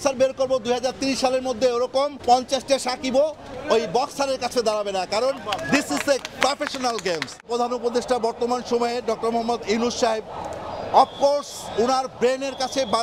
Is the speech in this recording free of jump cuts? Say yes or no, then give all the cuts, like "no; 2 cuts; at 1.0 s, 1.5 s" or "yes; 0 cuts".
no; 2 cuts; at 2.2 s, 7.5 s